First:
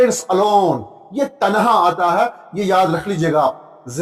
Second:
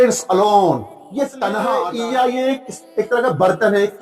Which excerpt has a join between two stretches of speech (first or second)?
second